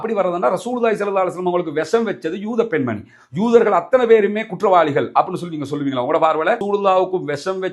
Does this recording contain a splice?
no; 0 cuts

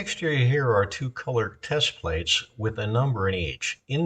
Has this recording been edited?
no; 0 cuts

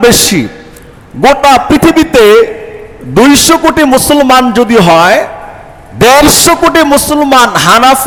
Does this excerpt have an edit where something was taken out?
no; 0 cuts

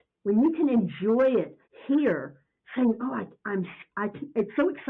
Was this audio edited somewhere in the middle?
no; 0 cuts

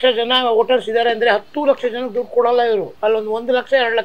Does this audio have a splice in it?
yes; 1 cut; at 2.9 s

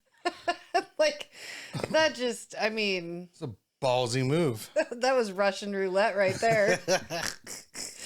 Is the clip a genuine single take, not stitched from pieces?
yes; 0 cuts

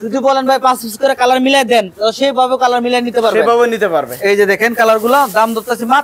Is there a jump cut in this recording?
no; 0 cuts

